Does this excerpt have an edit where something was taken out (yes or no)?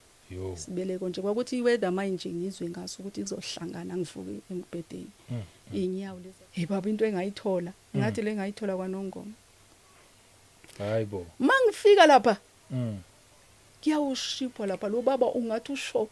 yes